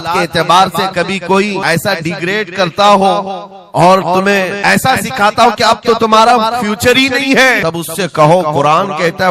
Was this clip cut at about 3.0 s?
no; 3 cuts; at 1.6 s, 4.5 s, 7.6 s

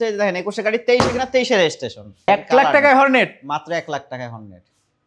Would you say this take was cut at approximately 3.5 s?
no; 1 cut; at 2.3 s

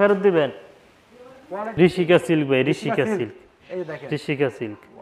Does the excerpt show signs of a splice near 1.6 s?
yes; 1 cut; at 1.6 s

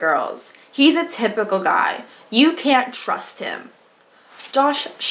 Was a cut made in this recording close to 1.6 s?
no; 0 cuts

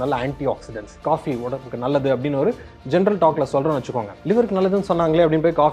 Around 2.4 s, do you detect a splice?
no; 1 cut; at 4.1 s

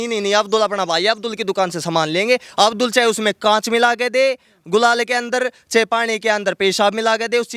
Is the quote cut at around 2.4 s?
no; 0 cuts

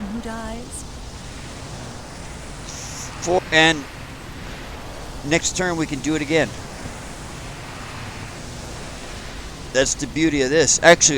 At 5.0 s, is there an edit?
no; 1 cut; at 3.4 s

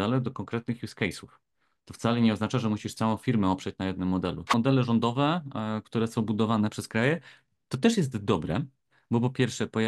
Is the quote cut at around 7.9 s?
no; 1 cut; at 4.5 s

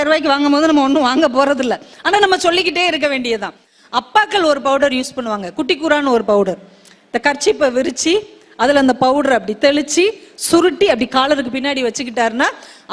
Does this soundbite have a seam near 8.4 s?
no; 1 cut; at 3.7 s

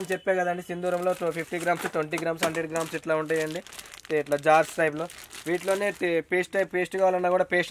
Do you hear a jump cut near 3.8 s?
no; 0 cuts

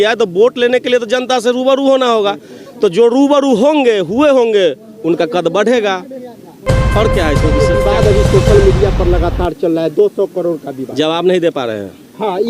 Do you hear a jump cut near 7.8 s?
yes; 1 cut; at 7.8 s

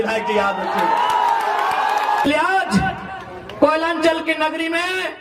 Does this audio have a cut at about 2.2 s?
yes; 1 cut; at 2.2 s

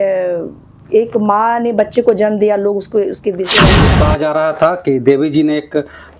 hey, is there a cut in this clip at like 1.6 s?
no; 1 cut; at 3.9 s

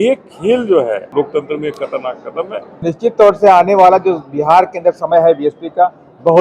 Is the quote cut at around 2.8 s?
yes; 2 cuts; at 1.1 s, 2.8 s

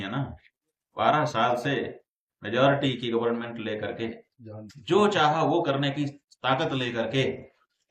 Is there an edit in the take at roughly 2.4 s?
no; 0 cuts

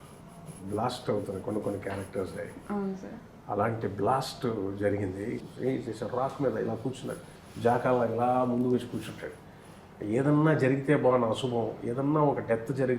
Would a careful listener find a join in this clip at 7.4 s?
no; 1 cut; at 5.4 s

